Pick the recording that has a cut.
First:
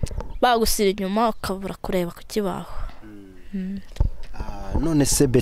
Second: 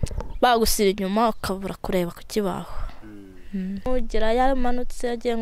second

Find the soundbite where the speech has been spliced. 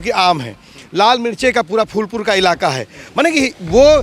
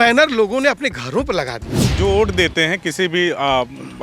second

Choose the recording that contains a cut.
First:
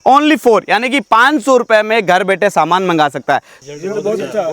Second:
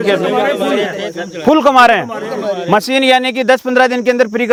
first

